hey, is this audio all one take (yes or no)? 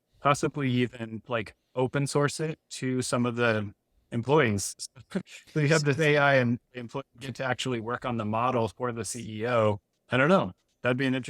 no